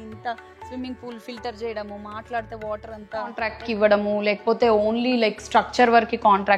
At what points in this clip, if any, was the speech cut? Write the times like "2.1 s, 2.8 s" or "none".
3.6 s